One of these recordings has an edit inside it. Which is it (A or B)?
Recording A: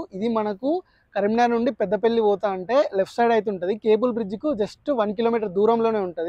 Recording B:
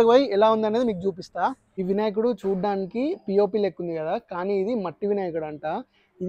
B